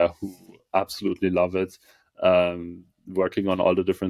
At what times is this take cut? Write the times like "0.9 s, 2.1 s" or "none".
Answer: none